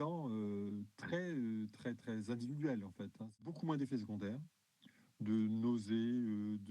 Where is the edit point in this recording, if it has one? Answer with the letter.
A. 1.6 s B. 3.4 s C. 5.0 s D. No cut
B